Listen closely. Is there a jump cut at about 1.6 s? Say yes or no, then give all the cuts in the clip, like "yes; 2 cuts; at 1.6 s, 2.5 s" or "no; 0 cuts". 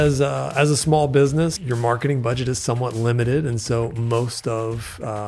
yes; 1 cut; at 1.6 s